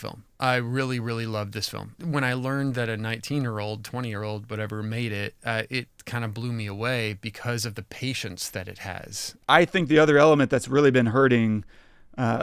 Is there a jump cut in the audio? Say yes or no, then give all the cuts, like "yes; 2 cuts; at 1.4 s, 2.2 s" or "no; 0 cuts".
yes; 2 cuts; at 1.9 s, 9.3 s